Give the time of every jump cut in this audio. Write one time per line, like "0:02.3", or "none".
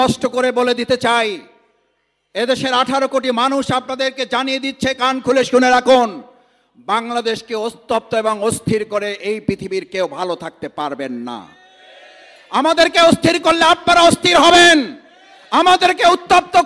none